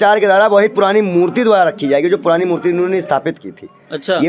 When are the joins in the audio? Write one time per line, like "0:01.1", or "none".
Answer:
none

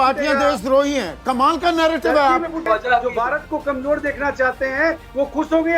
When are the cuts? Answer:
0:02.6

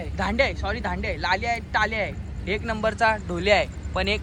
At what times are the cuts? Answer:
none

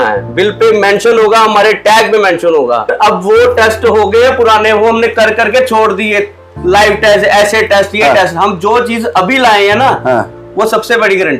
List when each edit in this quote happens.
0:02.9

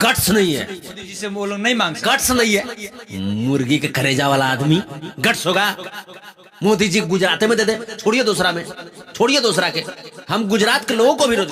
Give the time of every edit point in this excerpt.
none

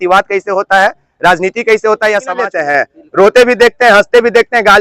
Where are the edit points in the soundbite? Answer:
0:02.5

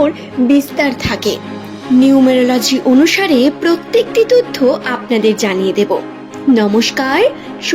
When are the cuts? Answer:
0:01.6

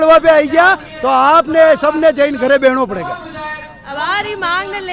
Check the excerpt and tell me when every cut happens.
none

